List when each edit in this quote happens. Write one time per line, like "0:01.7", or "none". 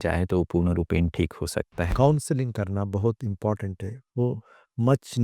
0:01.8